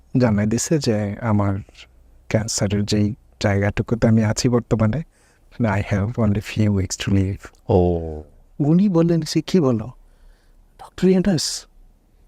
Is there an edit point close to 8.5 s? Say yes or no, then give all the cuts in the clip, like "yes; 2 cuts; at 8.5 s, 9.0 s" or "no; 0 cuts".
yes; 1 cut; at 8.5 s